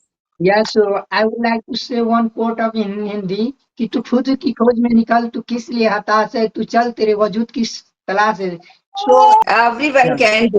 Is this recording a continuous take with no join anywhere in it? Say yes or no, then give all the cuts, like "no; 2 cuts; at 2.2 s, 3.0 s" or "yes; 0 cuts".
no; 1 cut; at 9.4 s